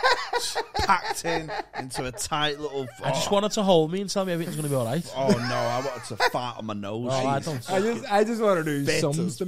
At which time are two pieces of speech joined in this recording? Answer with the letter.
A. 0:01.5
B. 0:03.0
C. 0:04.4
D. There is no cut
D